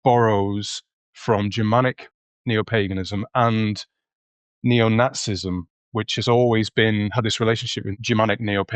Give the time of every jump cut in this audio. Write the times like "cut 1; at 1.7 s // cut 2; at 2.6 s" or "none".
cut 1; at 7.8 s